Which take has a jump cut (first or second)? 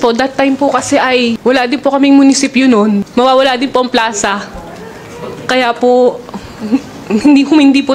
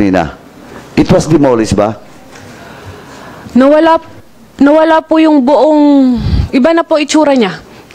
first